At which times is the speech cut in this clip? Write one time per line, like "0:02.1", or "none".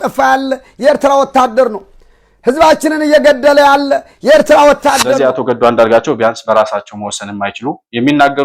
0:05.2